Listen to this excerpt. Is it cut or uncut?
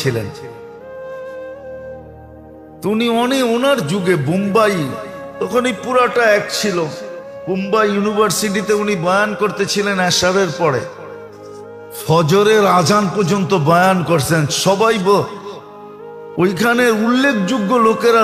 uncut